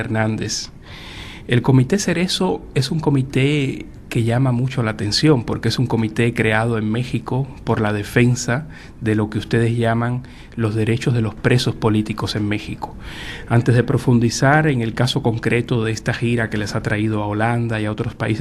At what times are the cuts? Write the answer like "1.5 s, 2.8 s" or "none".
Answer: 9.7 s